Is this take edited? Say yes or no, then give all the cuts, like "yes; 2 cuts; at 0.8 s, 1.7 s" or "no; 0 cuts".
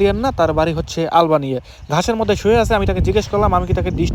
no; 0 cuts